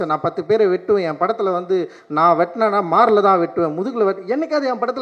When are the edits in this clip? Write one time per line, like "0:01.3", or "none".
none